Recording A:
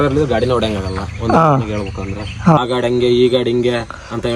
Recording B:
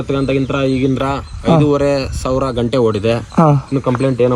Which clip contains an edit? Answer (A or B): A